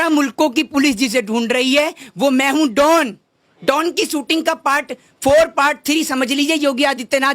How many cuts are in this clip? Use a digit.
0